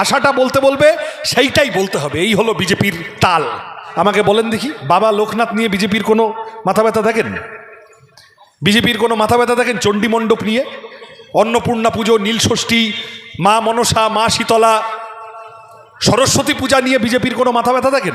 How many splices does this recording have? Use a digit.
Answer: 1